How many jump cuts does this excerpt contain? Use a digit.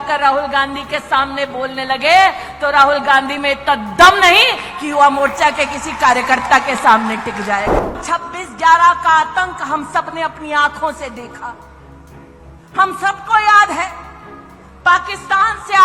1